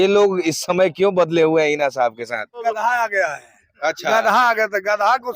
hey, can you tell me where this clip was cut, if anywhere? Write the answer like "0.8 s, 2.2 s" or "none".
2.6 s